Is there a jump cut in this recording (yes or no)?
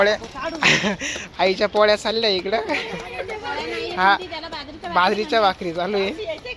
no